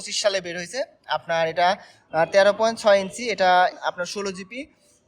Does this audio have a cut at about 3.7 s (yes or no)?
yes